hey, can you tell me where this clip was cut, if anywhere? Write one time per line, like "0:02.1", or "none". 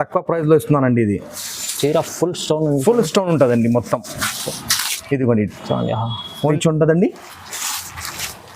0:06.5